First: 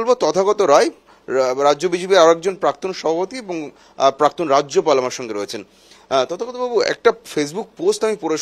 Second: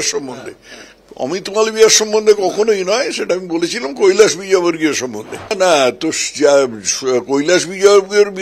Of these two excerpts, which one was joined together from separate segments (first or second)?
second